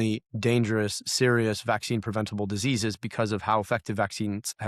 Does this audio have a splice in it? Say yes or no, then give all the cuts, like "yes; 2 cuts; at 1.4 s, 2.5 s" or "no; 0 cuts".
no; 0 cuts